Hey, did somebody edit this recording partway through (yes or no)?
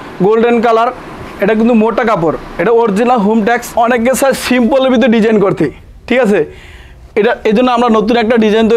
yes